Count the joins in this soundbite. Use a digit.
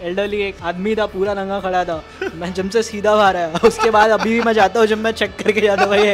0